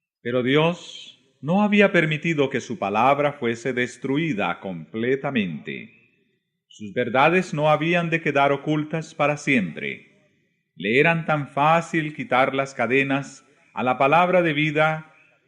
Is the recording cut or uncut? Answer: uncut